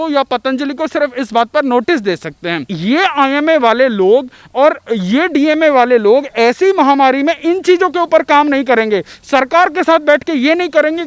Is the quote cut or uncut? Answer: cut